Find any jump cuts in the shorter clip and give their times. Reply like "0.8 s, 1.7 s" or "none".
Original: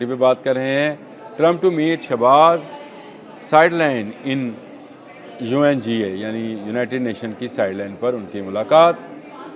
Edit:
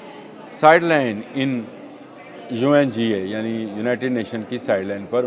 none